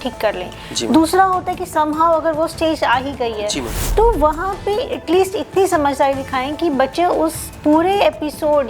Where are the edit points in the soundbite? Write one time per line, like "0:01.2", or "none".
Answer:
none